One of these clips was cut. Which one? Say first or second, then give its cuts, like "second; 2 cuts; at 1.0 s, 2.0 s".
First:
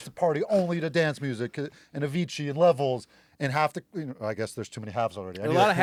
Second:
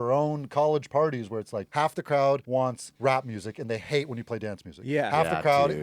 second; 2 cuts; at 1.6 s, 2.6 s